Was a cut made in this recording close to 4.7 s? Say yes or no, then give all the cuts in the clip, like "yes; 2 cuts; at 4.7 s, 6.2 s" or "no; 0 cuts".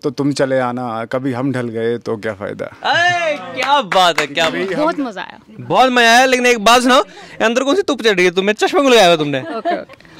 yes; 1 cut; at 4.7 s